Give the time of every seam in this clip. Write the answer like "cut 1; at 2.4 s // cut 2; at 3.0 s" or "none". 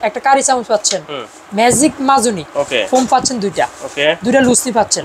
cut 1; at 2.5 s